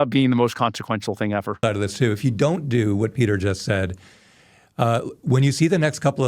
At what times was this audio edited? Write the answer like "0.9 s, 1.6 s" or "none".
1.6 s

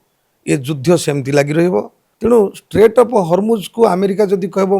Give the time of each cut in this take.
2.0 s

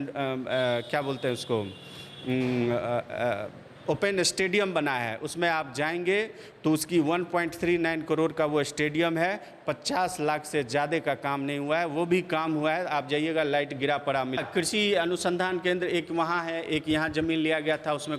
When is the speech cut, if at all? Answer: 14.4 s

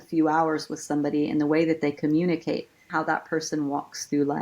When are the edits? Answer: 2.9 s

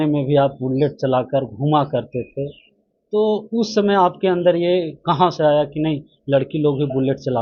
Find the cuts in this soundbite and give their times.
none

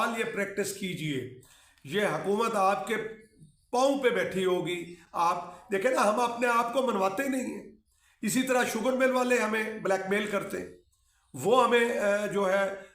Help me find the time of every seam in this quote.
none

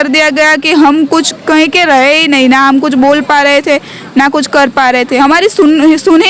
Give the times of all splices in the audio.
none

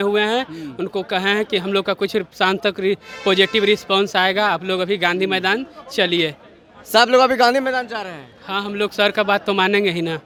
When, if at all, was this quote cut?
none

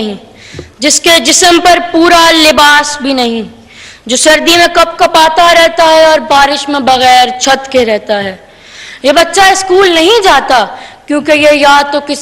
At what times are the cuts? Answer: none

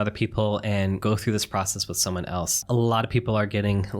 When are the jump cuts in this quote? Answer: 1.0 s, 2.6 s

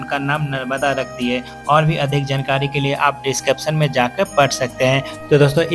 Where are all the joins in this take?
none

